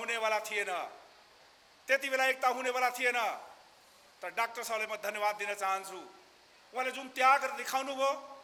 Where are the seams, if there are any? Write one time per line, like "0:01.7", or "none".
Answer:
none